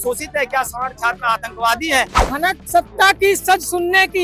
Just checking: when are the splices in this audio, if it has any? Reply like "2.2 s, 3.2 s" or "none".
2.2 s